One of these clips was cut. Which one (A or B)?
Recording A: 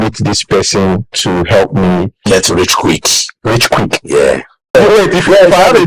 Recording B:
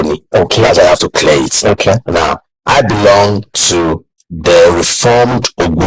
A